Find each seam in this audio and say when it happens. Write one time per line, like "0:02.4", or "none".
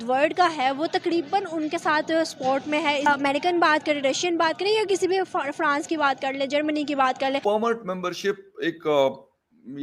0:03.1
0:07.4

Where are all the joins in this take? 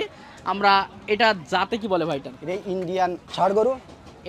0:03.2

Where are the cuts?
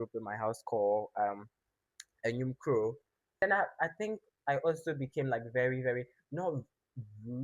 0:03.4

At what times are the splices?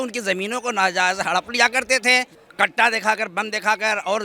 0:02.4

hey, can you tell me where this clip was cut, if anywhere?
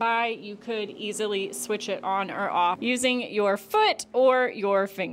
0:02.8

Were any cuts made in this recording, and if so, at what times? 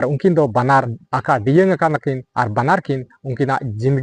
0:01.0

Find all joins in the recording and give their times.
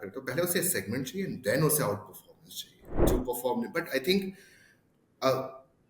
0:03.0

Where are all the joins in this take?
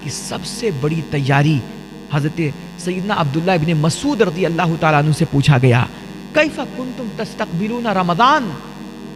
none

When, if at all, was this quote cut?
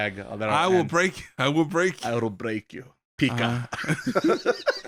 none

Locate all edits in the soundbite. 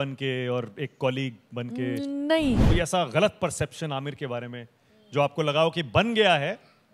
0:02.6

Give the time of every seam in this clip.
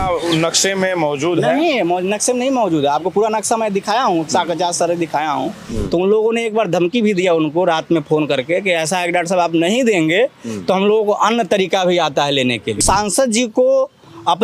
0:05.6
0:12.8

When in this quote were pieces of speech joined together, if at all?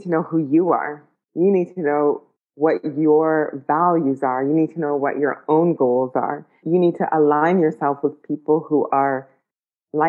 0:06.6

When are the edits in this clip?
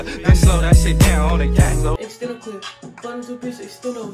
0:01.9

